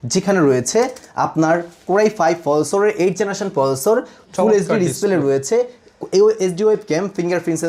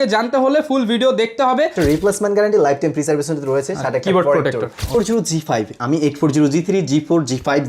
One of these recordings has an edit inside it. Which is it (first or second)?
second